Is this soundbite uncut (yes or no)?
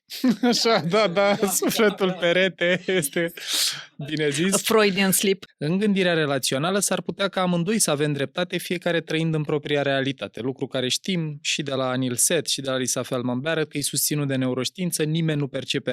no